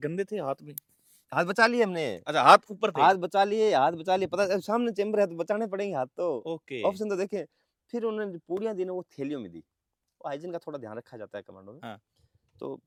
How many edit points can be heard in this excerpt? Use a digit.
0